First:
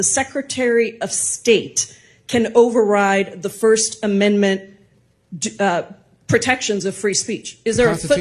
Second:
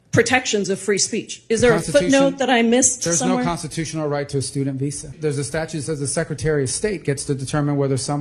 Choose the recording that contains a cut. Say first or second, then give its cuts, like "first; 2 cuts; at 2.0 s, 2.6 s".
second; 1 cut; at 5.1 s